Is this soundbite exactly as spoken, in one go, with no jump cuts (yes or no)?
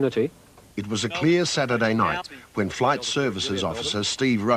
yes